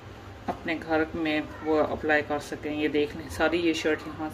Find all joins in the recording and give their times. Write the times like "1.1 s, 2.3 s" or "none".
none